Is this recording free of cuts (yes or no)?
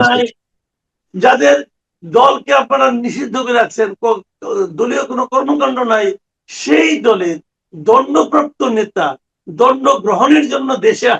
yes